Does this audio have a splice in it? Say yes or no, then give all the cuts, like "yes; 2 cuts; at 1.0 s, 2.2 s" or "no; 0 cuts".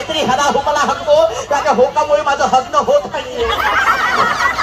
no; 0 cuts